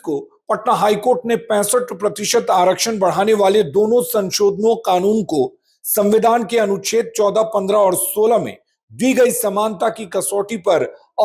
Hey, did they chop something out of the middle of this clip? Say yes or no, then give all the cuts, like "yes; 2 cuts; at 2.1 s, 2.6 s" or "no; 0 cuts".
no; 0 cuts